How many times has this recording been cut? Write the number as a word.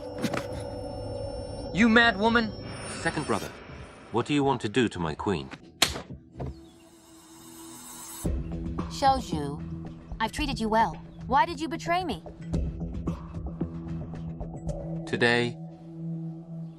one